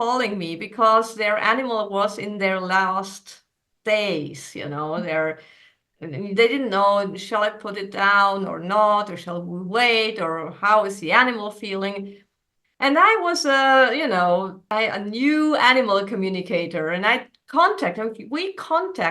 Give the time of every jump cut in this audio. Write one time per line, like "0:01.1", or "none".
0:14.6